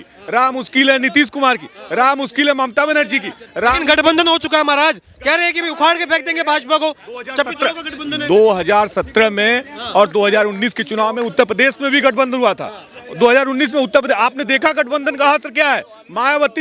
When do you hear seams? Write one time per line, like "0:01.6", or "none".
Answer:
none